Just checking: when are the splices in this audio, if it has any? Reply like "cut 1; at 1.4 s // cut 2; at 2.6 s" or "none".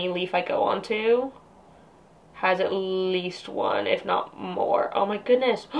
none

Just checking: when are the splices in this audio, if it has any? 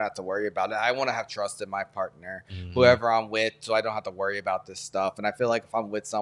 none

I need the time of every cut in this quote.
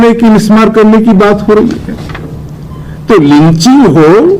none

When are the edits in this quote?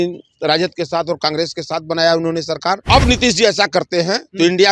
cut 1; at 2.8 s

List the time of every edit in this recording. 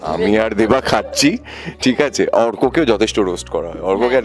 none

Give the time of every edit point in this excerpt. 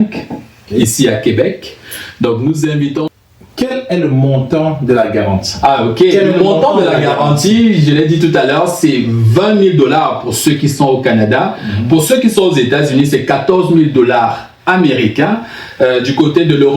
cut 1; at 3.0 s

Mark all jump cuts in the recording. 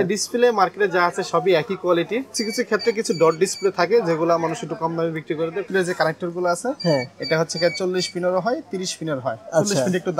cut 1; at 2.3 s // cut 2; at 5.6 s

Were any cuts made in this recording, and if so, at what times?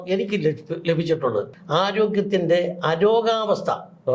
cut 1; at 1.5 s

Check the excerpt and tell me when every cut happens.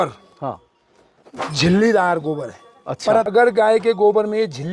cut 1; at 3.3 s

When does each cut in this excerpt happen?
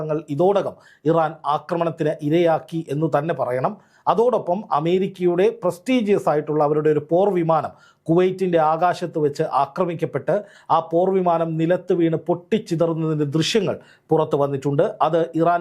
none

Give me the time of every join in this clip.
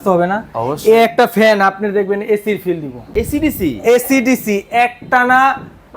cut 1; at 3.0 s

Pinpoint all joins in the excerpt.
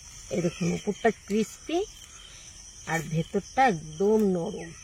none

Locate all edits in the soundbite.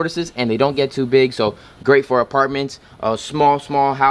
none

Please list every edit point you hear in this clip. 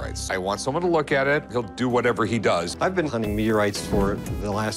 none

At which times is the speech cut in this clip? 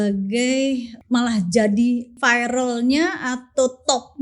cut 1; at 0.9 s // cut 2; at 2.2 s

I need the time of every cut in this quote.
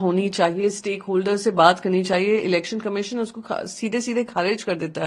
none

